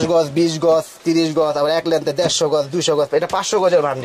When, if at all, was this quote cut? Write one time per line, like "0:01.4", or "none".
none